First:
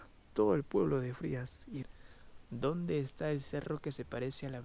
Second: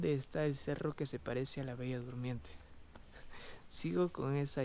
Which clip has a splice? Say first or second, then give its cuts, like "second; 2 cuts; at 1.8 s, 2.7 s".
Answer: first; 1 cut; at 1.8 s